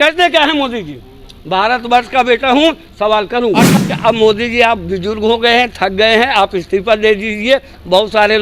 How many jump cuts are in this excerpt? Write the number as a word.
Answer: one